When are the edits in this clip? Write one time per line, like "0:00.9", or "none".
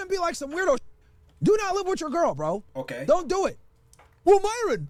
none